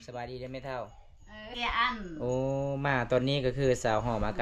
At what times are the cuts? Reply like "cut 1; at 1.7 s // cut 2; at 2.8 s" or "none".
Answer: cut 1; at 1.5 s